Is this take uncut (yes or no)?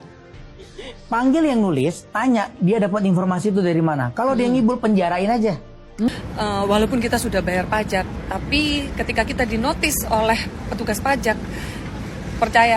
no